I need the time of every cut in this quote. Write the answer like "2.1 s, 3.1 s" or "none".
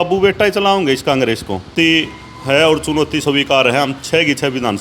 1.7 s

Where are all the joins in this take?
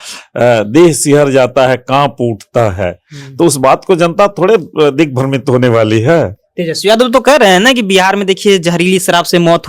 none

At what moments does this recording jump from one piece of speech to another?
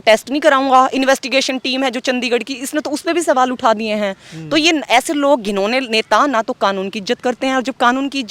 none

